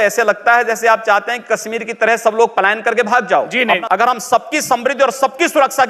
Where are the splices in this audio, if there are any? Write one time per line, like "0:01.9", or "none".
0:03.8